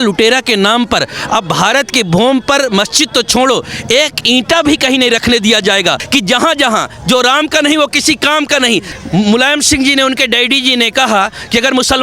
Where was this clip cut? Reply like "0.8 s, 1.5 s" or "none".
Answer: 6.0 s, 8.9 s